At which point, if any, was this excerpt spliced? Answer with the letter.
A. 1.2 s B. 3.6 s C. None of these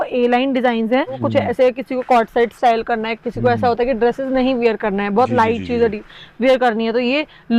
A